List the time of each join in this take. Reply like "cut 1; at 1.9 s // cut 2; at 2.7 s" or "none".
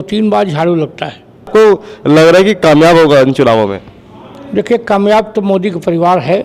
cut 1; at 1.5 s